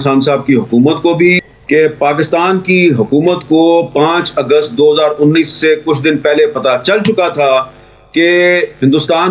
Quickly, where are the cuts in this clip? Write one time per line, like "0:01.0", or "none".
0:01.4